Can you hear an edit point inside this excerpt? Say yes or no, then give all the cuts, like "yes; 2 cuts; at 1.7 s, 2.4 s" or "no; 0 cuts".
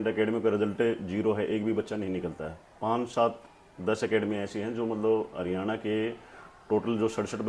no; 0 cuts